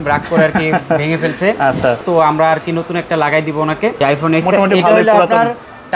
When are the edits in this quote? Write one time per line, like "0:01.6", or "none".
0:02.0
0:04.0

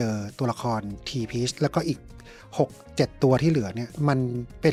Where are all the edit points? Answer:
none

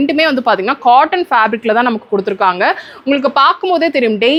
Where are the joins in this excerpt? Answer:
none

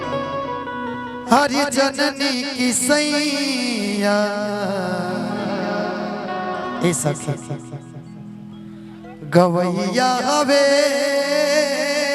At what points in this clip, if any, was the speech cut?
none

